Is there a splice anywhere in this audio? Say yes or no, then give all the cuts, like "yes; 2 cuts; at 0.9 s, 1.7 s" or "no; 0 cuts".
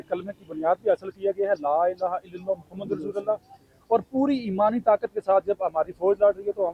no; 0 cuts